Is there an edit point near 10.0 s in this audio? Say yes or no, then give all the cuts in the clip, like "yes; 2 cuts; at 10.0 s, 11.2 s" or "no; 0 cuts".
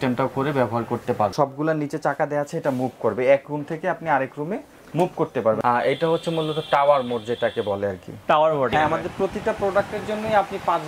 no; 3 cuts; at 1.3 s, 5.6 s, 8.7 s